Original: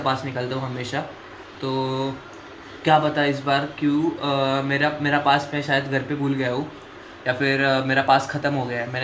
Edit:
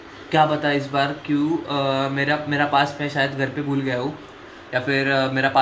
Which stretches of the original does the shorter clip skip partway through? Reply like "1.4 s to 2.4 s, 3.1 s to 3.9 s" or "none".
none